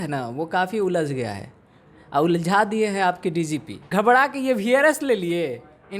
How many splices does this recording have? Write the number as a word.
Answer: one